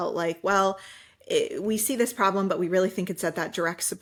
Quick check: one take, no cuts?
yes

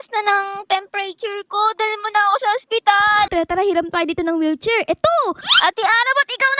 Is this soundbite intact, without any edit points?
no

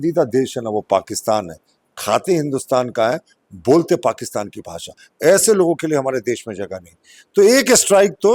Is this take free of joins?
yes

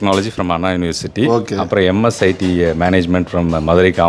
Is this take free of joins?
yes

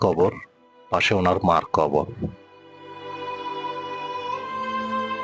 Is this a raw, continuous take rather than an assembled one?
yes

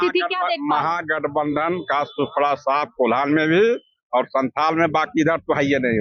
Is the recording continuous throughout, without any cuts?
yes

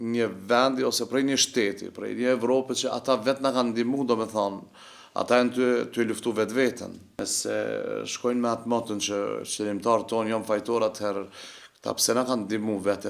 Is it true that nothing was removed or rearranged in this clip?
no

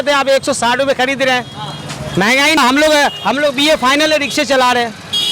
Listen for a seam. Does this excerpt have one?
yes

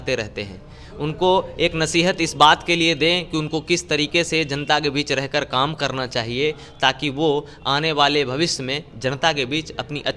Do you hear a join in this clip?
no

